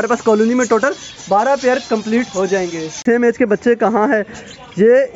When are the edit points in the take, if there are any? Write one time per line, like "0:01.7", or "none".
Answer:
0:03.0